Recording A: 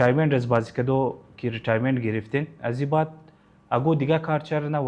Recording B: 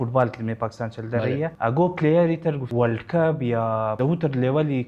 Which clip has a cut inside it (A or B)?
B